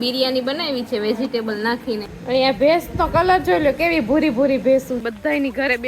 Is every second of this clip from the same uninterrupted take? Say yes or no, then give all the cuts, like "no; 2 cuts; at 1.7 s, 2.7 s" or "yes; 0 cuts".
no; 2 cuts; at 2.1 s, 5.0 s